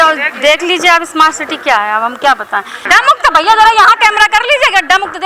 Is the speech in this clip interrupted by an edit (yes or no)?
yes